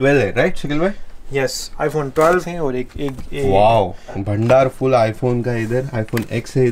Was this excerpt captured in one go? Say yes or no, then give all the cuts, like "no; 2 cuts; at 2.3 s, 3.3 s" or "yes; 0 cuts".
no; 2 cuts; at 2.4 s, 4.2 s